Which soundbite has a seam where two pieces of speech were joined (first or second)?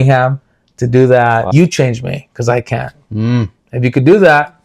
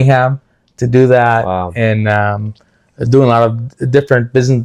first